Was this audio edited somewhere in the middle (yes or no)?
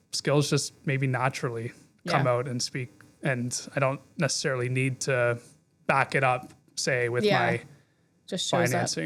no